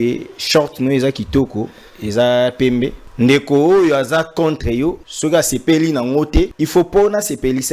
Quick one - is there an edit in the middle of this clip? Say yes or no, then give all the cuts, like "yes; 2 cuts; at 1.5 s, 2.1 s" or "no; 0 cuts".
yes; 3 cuts; at 3.0 s, 5.1 s, 6.6 s